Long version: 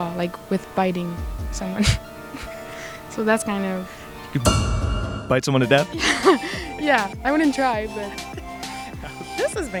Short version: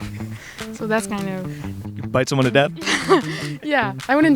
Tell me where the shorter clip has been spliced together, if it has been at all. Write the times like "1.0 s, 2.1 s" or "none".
1.9 s